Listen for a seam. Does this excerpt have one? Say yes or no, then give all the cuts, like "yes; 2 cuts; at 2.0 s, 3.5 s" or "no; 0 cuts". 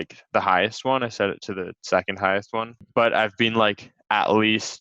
yes; 1 cut; at 2.7 s